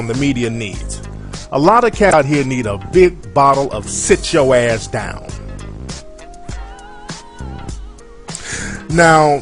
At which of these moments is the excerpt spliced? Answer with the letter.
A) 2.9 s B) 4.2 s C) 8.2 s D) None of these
D